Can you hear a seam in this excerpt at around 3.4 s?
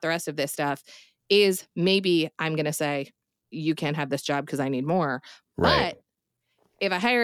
yes; 1 cut; at 3.4 s

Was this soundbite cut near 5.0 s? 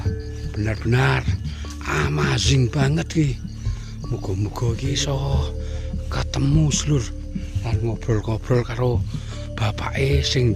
yes; 1 cut; at 5.0 s

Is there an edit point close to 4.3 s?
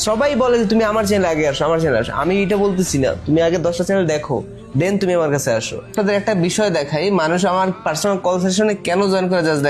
no; 1 cut; at 5.9 s

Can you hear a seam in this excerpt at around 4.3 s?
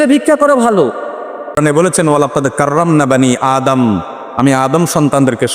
no; 1 cut; at 1.6 s

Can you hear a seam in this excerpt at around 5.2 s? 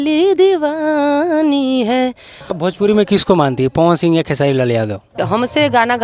yes; 2 cuts; at 2.4 s, 5.2 s

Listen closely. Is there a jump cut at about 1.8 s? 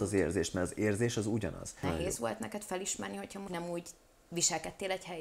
yes; 2 cuts; at 1.8 s, 3.5 s

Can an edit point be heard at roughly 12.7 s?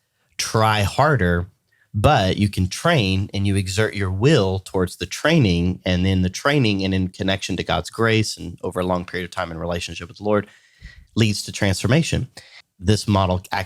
yes; 1 cut; at 12.7 s

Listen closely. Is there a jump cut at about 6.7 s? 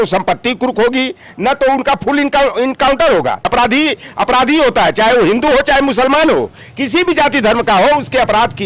no; 1 cut; at 3.5 s

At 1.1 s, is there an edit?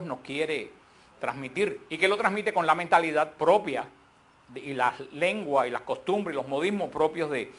no; 1 cut; at 4.4 s

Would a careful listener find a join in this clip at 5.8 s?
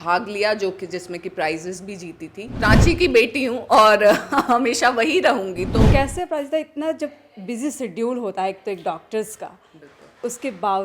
yes; 2 cuts; at 2.5 s, 5.8 s

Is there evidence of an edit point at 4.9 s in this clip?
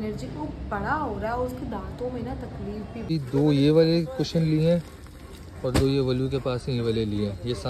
no; 1 cut; at 3.1 s

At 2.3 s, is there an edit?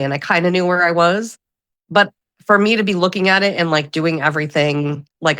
no; 0 cuts

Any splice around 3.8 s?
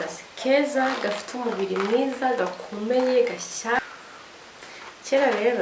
yes; 1 cut; at 3.8 s

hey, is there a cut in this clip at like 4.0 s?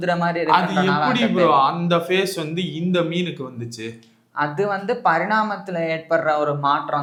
no; 0 cuts

